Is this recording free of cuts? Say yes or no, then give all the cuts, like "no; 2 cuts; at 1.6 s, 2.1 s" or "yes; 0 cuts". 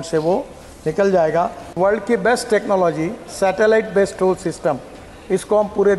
no; 1 cut; at 1.6 s